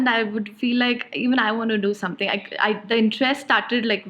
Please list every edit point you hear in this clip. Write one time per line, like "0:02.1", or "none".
none